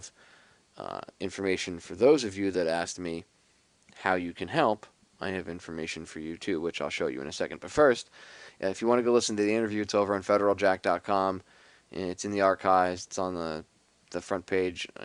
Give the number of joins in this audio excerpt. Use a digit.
1